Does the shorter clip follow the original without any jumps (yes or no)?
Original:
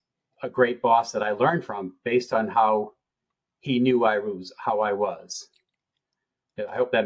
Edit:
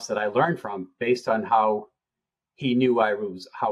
yes